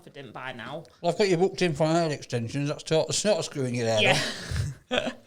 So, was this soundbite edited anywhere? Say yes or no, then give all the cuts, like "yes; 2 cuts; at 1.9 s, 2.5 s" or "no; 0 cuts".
no; 0 cuts